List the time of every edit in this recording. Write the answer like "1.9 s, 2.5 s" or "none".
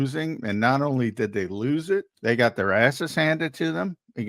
2.1 s